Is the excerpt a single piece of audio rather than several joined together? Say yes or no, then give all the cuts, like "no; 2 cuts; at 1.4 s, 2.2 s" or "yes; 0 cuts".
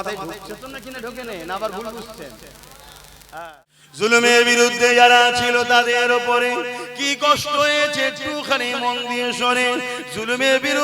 no; 1 cut; at 3.5 s